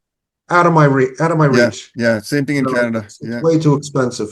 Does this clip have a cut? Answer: no; 0 cuts

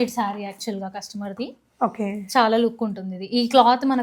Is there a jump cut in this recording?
no; 0 cuts

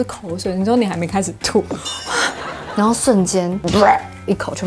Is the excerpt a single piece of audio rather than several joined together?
no; 1 cut; at 2.7 s

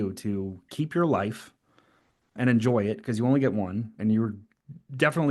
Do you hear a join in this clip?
yes; 2 cuts; at 2.4 s, 3.9 s

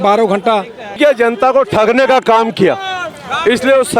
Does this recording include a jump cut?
yes; 1 cut; at 1.0 s

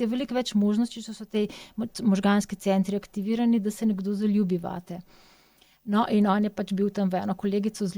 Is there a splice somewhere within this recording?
no; 0 cuts

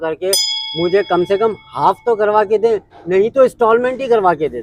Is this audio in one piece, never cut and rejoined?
yes; 0 cuts

